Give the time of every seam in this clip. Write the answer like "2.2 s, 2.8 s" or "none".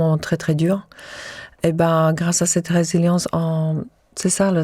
none